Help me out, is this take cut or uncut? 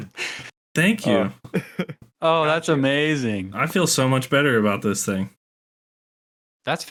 uncut